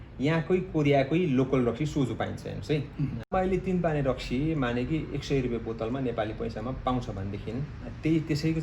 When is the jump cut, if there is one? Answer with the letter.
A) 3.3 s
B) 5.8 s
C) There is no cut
A